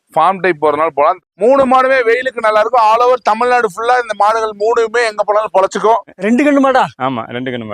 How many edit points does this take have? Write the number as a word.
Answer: two